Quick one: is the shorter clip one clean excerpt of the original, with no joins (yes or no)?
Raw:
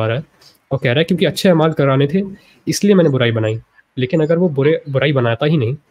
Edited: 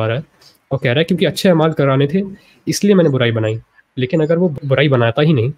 no